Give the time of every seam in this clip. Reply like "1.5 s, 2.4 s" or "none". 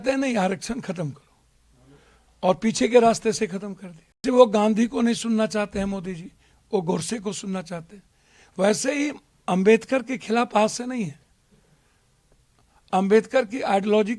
4.2 s